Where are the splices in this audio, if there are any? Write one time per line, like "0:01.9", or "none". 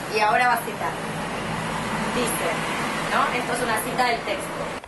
0:01.1